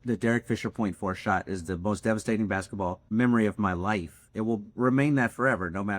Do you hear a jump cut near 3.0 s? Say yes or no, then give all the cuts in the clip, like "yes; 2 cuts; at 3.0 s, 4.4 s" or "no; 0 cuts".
yes; 1 cut; at 3.0 s